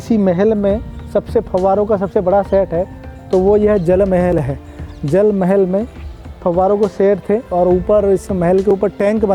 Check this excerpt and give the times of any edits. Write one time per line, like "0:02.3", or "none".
none

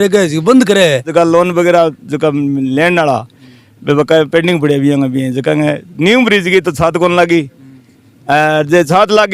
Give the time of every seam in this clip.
0:01.1

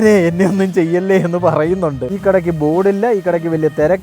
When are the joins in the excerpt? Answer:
0:02.1

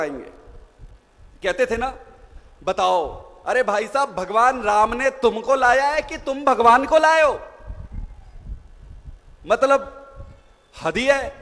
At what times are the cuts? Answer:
none

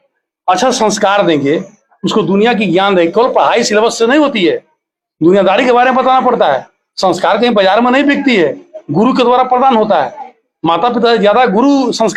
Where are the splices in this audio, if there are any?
none

